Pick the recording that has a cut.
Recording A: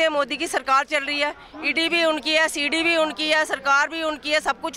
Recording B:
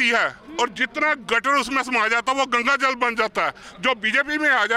B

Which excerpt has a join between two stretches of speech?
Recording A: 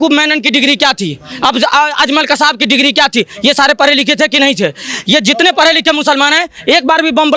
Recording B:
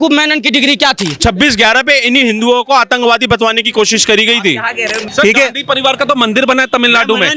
B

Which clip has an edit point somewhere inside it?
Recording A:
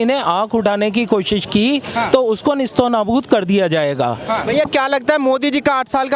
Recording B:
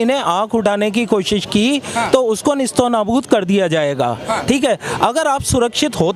A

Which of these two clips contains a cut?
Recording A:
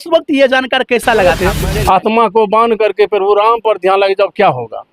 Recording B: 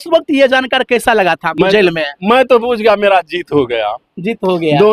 A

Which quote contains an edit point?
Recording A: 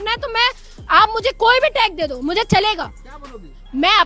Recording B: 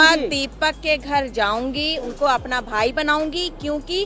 B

